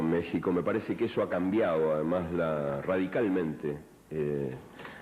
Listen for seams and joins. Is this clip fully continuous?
no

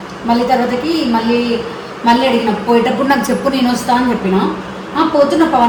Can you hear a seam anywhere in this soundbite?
no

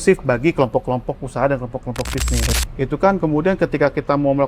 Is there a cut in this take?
yes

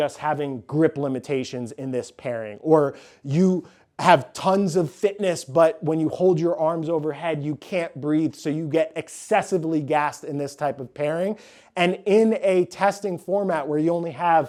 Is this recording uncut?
yes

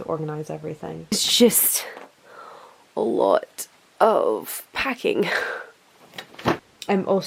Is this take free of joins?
yes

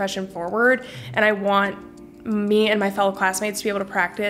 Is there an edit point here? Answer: no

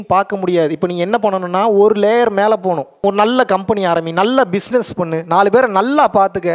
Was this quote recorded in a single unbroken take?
no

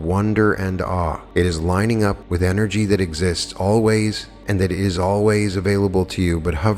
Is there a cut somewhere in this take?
yes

